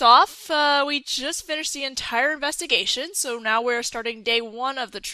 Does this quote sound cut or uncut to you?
cut